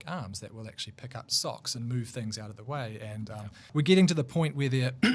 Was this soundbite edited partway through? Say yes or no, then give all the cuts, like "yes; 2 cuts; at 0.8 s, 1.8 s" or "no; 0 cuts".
yes; 1 cut; at 3.7 s